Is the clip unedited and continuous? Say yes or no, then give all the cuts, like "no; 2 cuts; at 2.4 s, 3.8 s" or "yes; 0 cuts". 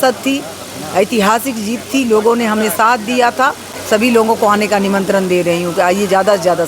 no; 1 cut; at 3.7 s